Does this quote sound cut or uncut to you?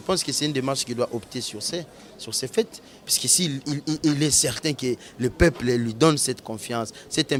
uncut